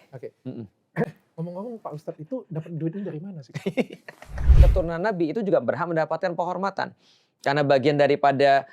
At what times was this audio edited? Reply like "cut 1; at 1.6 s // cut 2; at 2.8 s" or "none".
cut 1; at 4.5 s